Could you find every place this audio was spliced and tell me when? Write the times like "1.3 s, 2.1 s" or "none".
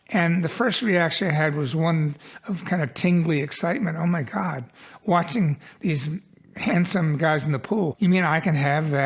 7.9 s